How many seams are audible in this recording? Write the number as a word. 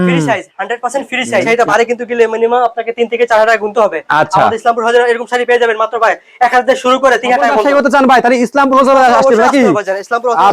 two